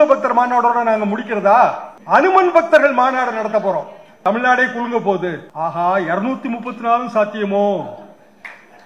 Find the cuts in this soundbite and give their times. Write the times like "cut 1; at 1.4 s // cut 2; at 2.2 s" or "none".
cut 1; at 1.9 s // cut 2; at 4.0 s // cut 3; at 5.5 s